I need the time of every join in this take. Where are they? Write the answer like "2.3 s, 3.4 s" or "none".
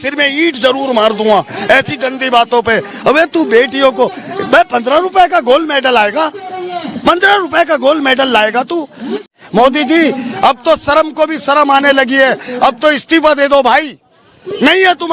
9.3 s

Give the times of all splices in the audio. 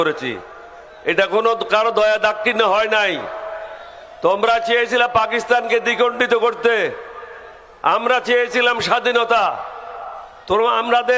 none

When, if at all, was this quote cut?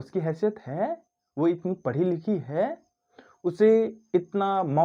none

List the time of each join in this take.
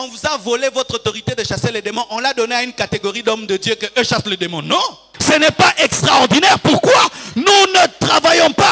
5.1 s

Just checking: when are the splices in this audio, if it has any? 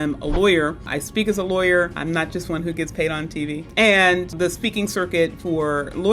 0.9 s, 2.0 s, 3.7 s, 4.3 s

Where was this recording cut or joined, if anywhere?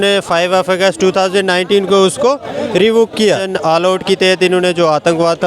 3.5 s

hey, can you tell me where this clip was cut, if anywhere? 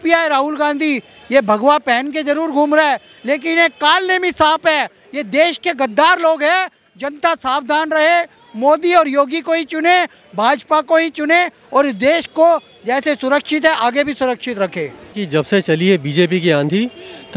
15.2 s

